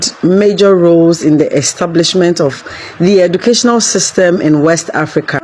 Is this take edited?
no; 0 cuts

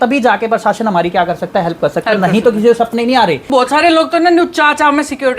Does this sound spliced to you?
yes; 1 cut; at 3.5 s

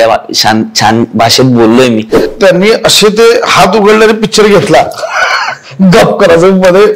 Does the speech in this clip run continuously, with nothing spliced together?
no; 1 cut; at 2.3 s

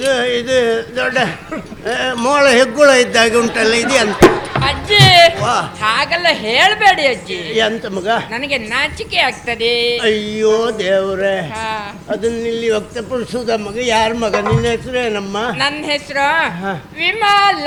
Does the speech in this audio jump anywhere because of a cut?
no; 0 cuts

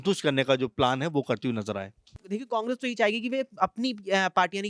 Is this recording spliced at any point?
yes; 1 cut; at 2.2 s

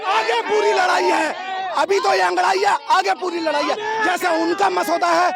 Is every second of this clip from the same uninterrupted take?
yes; 0 cuts

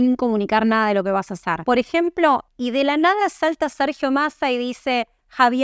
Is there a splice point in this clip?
yes; 2 cuts; at 1.5 s, 2.5 s

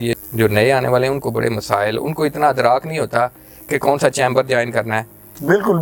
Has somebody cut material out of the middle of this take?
no; 0 cuts

